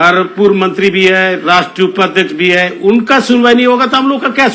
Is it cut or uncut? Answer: uncut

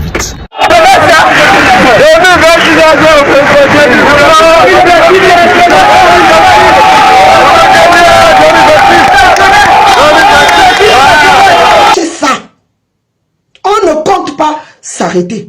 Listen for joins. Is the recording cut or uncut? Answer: cut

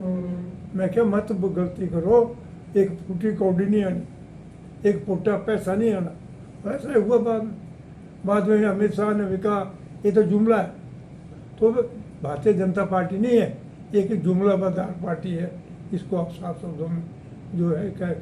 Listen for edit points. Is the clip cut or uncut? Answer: uncut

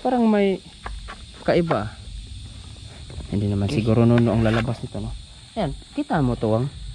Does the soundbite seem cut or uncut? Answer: uncut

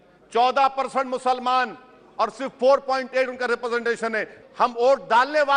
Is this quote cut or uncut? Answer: cut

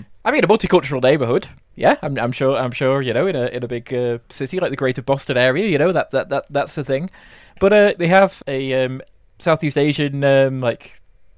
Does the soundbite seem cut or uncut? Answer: cut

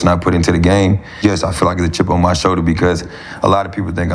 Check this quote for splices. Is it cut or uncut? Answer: cut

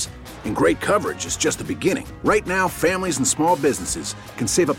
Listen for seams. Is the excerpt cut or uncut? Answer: uncut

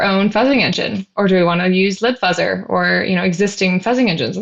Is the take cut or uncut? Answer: uncut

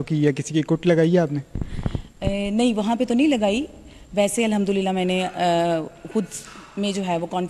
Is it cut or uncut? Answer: uncut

